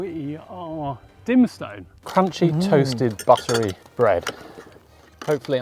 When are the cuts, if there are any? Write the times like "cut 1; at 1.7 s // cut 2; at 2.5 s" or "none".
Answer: cut 1; at 2.0 s // cut 2; at 3.8 s